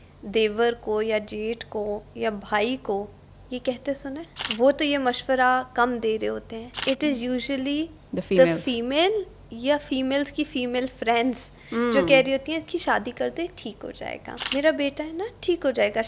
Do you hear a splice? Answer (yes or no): yes